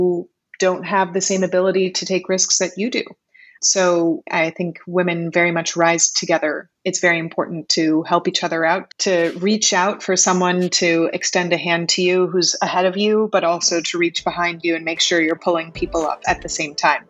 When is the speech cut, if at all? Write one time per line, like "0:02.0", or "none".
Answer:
0:16.2